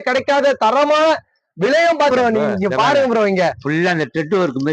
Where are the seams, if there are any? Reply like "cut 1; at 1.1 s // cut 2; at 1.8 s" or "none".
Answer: cut 1; at 2.1 s